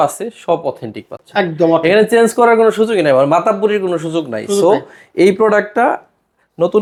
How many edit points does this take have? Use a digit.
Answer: 0